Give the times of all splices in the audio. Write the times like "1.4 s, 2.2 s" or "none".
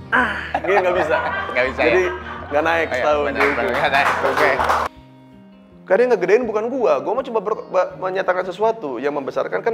4.9 s

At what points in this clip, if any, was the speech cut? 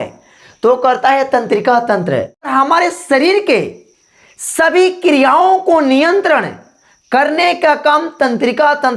2.5 s

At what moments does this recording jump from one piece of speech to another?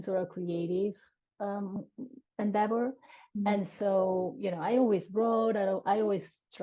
none

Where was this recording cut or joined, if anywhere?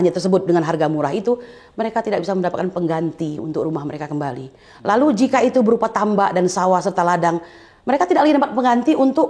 none

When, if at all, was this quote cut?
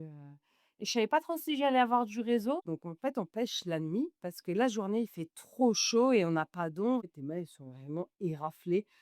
2.6 s, 7.0 s

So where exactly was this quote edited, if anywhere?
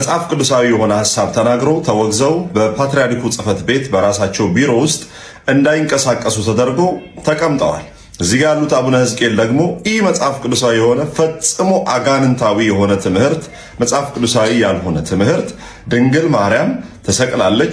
none

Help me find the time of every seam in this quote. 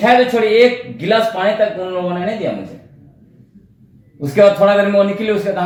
none

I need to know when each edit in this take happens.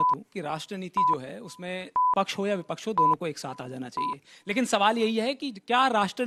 none

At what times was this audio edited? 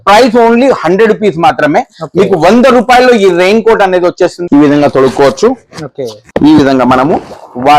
4.4 s

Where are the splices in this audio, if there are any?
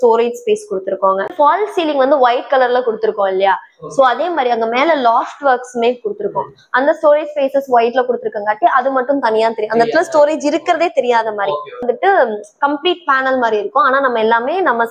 1.3 s, 11.8 s

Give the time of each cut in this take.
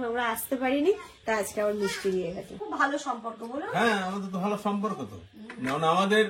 2.5 s

